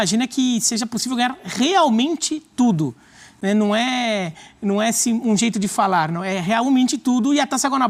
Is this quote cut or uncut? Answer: uncut